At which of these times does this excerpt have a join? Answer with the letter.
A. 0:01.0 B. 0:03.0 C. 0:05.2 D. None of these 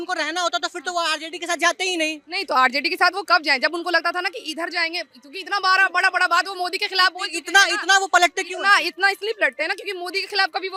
D